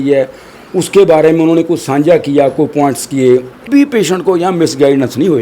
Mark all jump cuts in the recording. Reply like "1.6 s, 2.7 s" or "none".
3.6 s

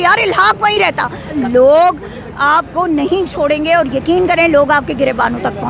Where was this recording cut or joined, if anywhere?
1.4 s

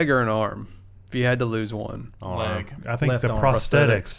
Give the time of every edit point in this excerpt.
2.8 s

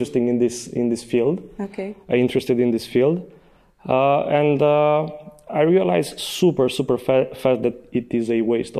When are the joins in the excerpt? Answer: none

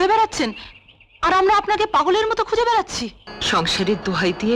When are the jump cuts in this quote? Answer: 3.3 s

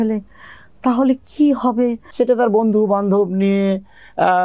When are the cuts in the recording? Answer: 2.0 s

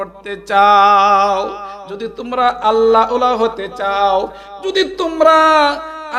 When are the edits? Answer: none

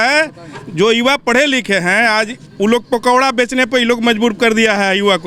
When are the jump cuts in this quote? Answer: none

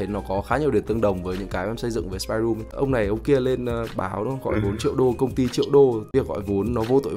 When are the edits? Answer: 2.7 s, 6.1 s

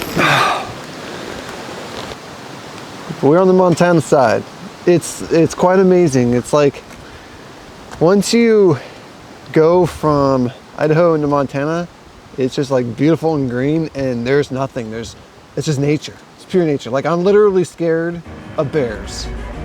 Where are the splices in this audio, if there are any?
2.2 s

